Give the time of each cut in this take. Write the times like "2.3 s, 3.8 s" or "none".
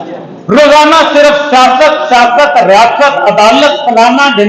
none